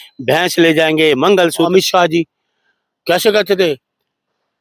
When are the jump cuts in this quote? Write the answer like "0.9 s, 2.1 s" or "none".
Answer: 1.7 s